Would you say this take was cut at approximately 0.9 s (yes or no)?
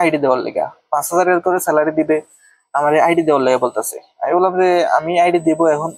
no